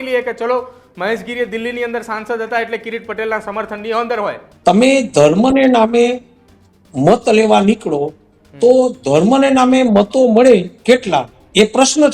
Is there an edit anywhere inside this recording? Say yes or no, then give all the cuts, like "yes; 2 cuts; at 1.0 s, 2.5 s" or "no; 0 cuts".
yes; 1 cut; at 4.4 s